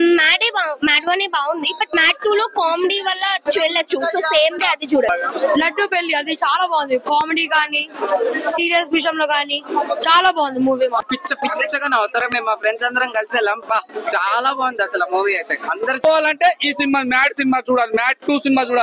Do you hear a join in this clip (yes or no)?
yes